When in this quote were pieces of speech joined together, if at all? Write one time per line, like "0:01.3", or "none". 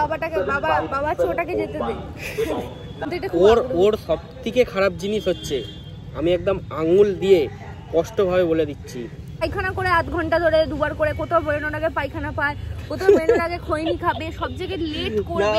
0:03.1
0:09.5